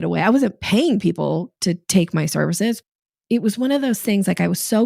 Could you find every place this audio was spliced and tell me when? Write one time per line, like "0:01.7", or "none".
0:01.5
0:02.8